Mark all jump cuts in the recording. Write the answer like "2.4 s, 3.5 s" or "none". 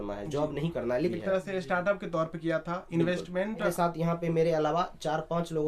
1.1 s, 3.7 s